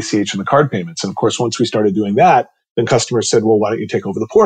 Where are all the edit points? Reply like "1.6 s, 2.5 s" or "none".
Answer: 2.6 s